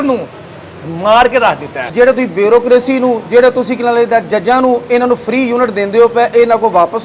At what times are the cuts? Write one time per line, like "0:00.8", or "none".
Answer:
0:01.8